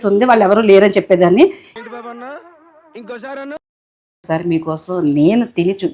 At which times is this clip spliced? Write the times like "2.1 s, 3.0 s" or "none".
1.7 s, 4.1 s